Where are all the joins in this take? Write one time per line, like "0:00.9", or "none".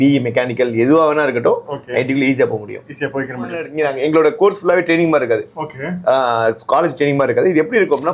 0:03.7